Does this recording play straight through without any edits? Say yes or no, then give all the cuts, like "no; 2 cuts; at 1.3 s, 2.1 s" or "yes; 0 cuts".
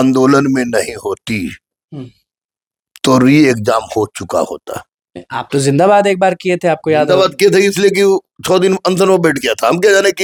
yes; 0 cuts